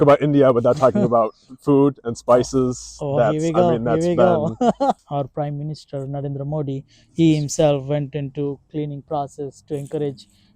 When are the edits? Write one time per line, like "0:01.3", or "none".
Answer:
0:05.0